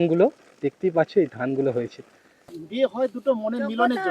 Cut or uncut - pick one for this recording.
cut